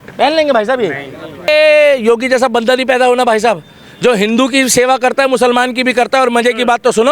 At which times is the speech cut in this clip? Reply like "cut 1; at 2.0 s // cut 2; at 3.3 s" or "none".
cut 1; at 1.5 s